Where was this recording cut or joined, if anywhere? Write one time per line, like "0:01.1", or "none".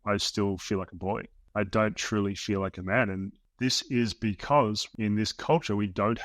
0:01.4
0:03.4
0:04.9